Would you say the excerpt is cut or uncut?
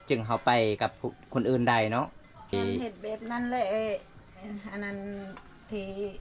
cut